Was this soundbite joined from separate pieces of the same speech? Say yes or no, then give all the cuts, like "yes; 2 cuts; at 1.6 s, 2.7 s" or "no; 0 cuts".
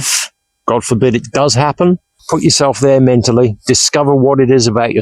yes; 1 cut; at 2.1 s